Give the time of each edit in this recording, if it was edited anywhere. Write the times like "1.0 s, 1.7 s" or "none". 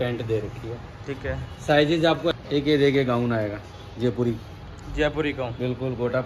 2.3 s

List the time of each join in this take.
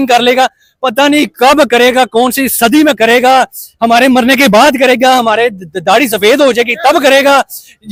none

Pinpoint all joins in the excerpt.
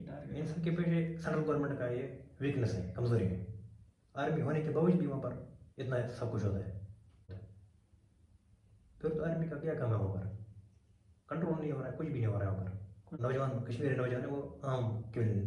7.4 s, 13.2 s

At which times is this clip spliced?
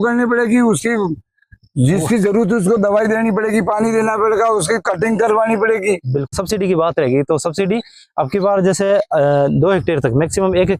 6.3 s

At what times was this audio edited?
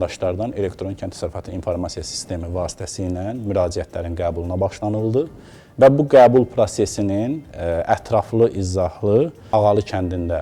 9.4 s

